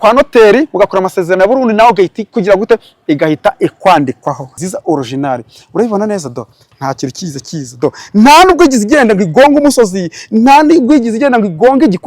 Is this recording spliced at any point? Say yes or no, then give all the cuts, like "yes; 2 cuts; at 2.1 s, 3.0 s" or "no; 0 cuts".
yes; 1 cut; at 4.7 s